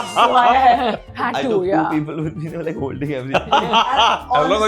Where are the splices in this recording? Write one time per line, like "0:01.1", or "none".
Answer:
0:01.1